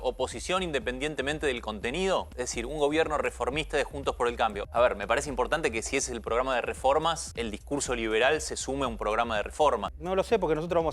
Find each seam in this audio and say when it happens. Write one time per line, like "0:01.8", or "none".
0:02.3
0:04.6
0:07.3
0:09.9